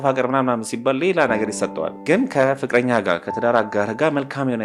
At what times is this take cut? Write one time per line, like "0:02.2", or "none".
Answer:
0:02.0